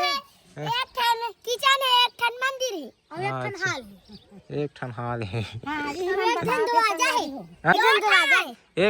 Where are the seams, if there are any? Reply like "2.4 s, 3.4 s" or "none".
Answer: 7.7 s